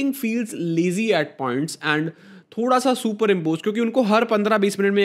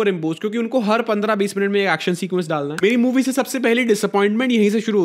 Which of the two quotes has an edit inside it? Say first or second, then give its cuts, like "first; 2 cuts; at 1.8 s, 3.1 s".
second; 1 cut; at 2.7 s